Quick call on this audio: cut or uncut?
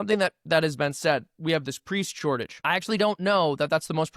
cut